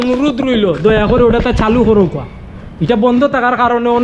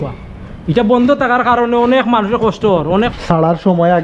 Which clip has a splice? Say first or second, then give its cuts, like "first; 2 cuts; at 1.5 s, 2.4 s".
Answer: second; 1 cut; at 3.1 s